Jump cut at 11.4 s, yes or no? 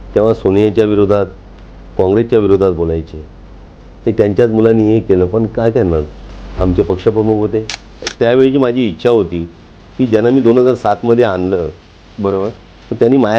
no